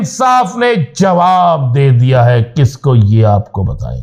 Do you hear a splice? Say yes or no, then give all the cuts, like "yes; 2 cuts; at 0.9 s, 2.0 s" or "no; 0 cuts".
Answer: no; 0 cuts